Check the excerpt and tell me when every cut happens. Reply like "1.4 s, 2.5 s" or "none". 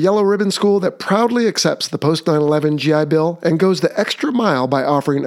none